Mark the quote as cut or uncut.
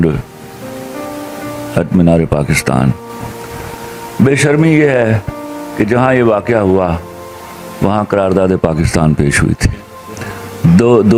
uncut